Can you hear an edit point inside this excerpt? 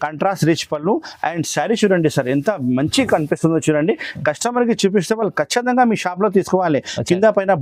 no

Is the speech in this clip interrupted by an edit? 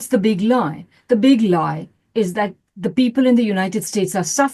no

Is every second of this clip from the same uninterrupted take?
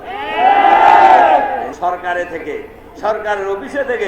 no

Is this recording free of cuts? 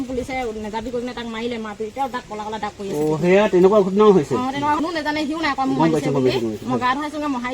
no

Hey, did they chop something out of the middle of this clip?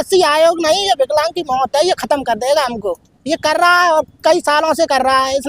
no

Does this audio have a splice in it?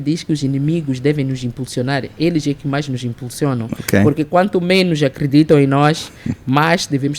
no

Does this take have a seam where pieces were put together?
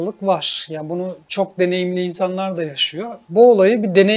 yes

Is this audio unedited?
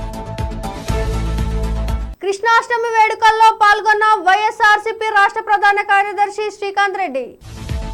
yes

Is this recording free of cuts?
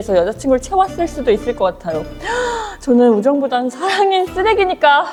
yes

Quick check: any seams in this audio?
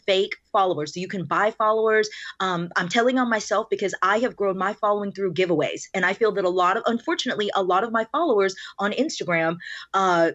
no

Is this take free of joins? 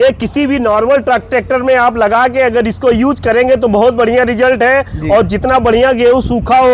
yes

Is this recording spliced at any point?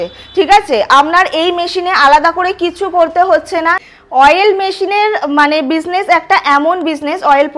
yes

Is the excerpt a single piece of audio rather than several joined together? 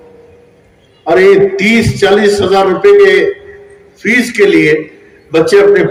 yes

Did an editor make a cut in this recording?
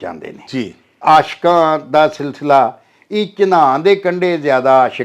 yes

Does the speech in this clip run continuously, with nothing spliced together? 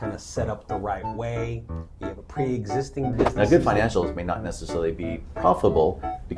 no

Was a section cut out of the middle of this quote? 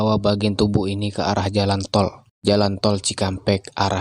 no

